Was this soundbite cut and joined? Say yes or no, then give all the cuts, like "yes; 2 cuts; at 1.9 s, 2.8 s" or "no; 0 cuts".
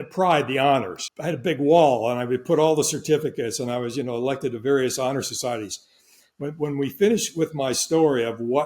yes; 1 cut; at 1.0 s